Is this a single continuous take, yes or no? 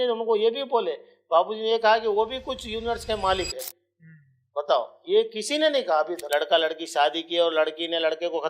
no